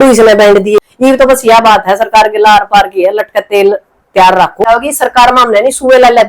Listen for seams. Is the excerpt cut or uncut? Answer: cut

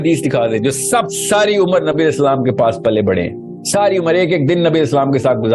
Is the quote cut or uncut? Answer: uncut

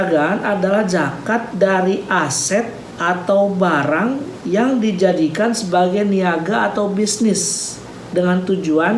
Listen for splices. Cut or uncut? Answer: cut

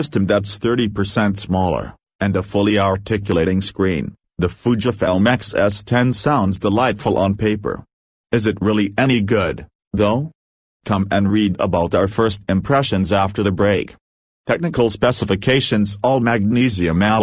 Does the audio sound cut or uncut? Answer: cut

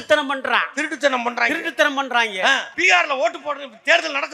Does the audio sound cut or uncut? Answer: cut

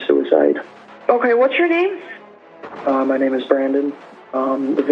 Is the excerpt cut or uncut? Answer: cut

